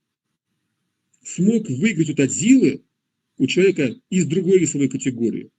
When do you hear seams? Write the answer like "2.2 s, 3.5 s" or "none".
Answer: none